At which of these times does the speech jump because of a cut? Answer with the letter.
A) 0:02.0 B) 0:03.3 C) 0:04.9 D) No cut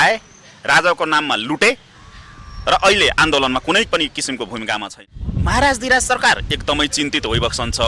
C